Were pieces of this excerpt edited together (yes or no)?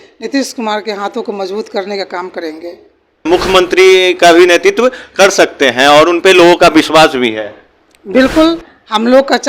yes